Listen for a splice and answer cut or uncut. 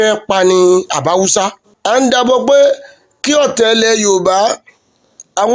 cut